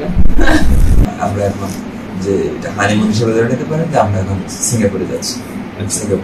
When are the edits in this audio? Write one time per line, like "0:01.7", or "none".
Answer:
0:01.1